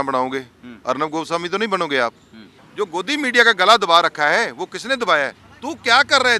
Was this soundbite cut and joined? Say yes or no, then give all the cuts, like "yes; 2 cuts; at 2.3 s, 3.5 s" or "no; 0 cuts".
yes; 2 cuts; at 2.6 s, 5.4 s